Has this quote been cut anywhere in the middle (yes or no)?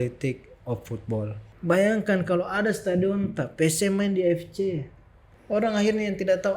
yes